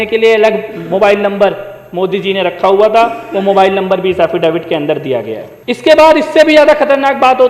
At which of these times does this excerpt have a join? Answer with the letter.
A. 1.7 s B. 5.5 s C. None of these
B